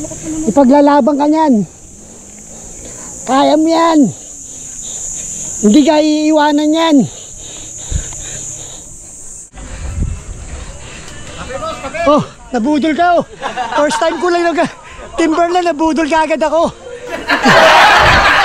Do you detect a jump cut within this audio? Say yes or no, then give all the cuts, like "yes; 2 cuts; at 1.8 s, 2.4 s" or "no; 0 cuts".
yes; 2 cuts; at 9.5 s, 17.3 s